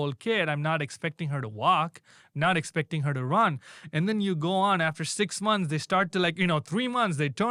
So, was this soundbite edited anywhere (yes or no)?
no